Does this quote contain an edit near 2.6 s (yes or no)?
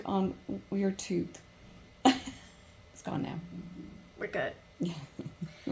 yes